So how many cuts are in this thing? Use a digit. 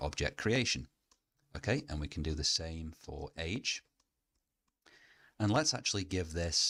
0